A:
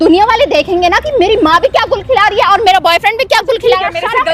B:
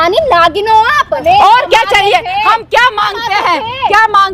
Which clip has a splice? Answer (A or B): B